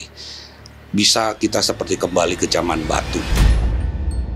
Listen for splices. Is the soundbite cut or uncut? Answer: cut